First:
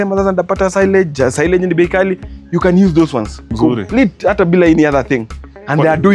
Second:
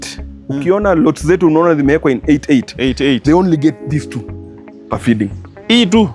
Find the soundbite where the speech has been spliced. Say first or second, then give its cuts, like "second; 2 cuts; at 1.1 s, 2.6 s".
first; 1 cut; at 3.5 s